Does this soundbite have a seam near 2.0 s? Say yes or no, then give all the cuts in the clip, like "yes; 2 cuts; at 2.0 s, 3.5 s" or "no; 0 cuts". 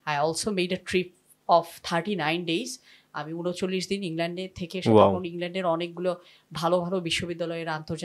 no; 0 cuts